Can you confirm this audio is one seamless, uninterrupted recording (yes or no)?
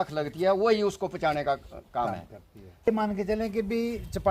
no